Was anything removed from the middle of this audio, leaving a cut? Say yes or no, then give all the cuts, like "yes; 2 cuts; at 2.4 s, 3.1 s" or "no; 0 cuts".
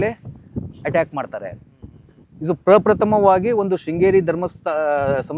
no; 0 cuts